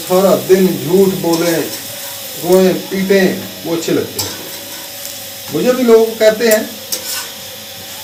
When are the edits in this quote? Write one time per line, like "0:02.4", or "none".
none

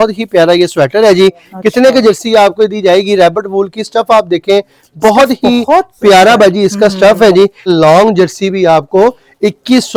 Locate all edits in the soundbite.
0:07.7

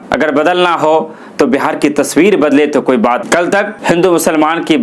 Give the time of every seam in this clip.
0:03.3

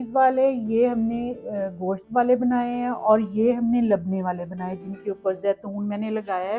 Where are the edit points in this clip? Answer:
none

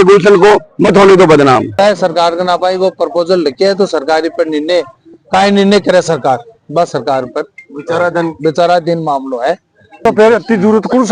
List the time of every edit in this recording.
0:01.8

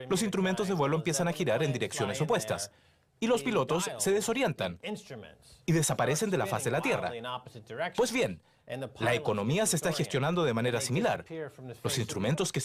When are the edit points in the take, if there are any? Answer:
none

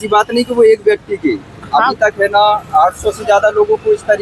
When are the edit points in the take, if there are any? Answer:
none

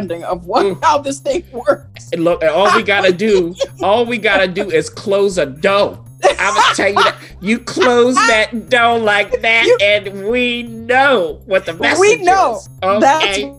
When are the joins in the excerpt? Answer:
0:12.7

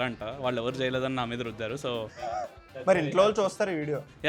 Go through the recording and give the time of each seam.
0:02.2

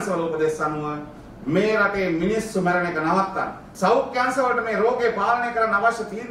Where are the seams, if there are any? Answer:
0:03.6

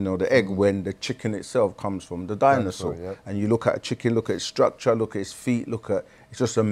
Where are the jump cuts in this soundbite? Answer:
none

